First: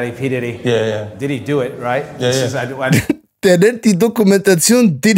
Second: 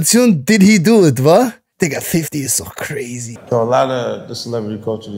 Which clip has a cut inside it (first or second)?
second